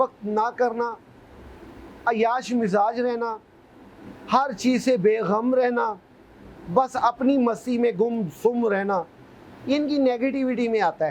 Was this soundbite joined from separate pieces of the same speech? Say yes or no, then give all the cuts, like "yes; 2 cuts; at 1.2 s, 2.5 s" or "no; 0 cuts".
no; 0 cuts